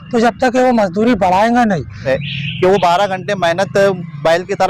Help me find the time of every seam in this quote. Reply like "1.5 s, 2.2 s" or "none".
2.2 s